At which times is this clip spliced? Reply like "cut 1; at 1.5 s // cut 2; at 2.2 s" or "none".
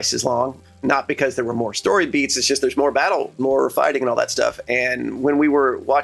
cut 1; at 0.7 s // cut 2; at 3.4 s